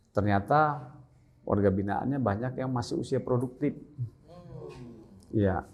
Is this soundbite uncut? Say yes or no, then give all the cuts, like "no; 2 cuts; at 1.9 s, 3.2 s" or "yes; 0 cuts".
yes; 0 cuts